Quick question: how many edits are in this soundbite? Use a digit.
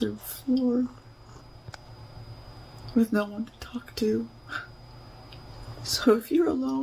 1